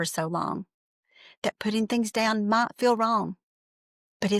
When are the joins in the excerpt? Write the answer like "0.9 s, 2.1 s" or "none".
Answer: none